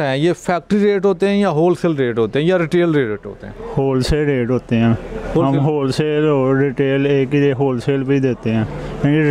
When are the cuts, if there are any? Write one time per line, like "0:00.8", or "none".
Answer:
none